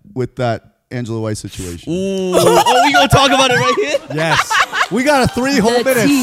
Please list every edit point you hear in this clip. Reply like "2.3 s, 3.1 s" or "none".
none

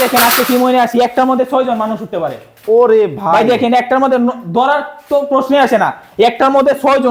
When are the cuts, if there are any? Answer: none

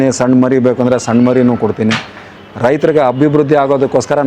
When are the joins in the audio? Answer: none

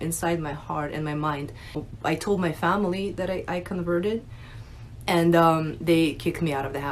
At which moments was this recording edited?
1.9 s

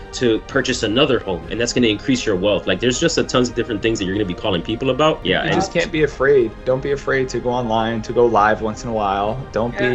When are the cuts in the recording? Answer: 5.2 s

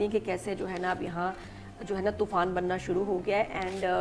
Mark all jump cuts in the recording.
none

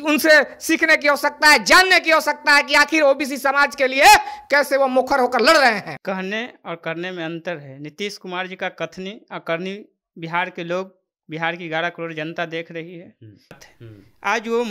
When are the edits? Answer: 6.0 s, 13.6 s

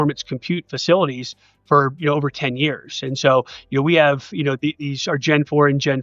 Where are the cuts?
none

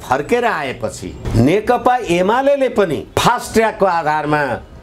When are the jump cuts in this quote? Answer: none

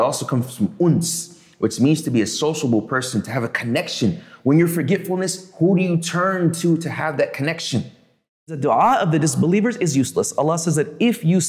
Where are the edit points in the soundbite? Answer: 8.6 s

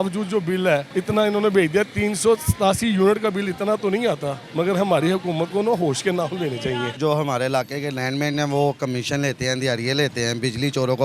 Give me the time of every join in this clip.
0.9 s, 4.4 s, 7.0 s

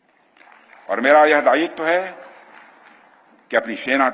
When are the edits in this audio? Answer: none

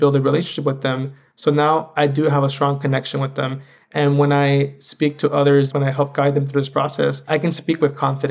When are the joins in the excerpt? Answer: 5.7 s, 7.3 s

